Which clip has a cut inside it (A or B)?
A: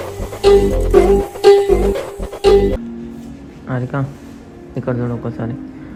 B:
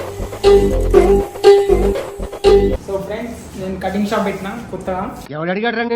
B